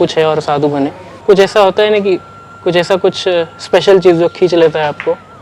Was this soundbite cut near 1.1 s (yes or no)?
yes